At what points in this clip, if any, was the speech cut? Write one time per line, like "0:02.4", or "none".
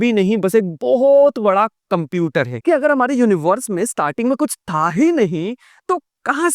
0:02.5